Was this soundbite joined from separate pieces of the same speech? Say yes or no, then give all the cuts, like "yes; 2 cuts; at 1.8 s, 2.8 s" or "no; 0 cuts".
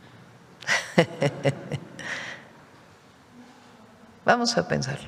no; 0 cuts